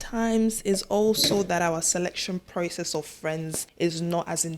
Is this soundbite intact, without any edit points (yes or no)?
no